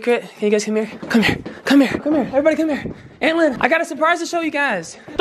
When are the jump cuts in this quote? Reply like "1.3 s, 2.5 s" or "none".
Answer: 1.0 s, 2.0 s, 3.6 s